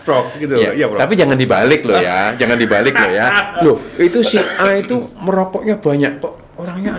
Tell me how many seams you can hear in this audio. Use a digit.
1